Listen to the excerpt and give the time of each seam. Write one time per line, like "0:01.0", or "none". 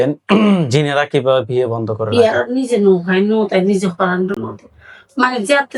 0:02.0